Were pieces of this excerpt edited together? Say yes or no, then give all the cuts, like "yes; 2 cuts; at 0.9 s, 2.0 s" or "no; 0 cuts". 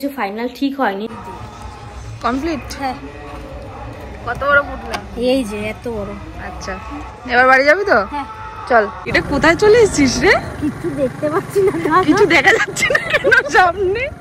yes; 2 cuts; at 1.1 s, 9.1 s